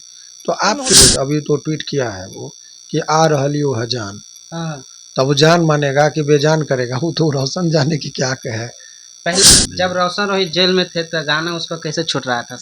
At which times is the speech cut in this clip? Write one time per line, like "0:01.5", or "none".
0:00.9
0:09.4